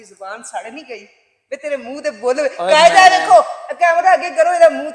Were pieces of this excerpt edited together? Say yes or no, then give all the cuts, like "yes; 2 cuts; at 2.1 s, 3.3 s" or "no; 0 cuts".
no; 0 cuts